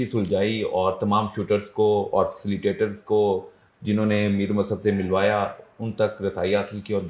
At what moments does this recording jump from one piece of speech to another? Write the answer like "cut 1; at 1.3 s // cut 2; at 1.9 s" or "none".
none

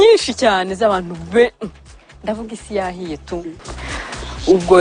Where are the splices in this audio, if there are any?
cut 1; at 3.6 s

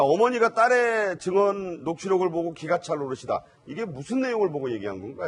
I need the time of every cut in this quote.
none

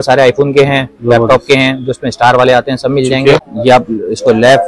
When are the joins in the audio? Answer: cut 1; at 3.5 s

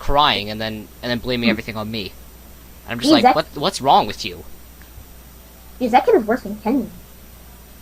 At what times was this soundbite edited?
none

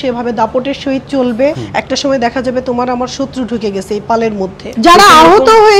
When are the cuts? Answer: cut 1; at 1.6 s // cut 2; at 4.6 s

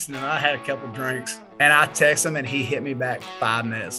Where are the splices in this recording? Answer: cut 1; at 1.4 s

